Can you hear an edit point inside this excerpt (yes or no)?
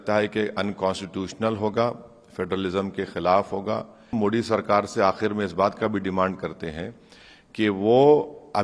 yes